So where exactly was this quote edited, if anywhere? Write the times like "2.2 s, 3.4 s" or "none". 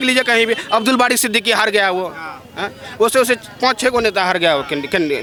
none